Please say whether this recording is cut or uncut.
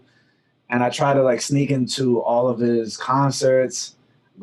uncut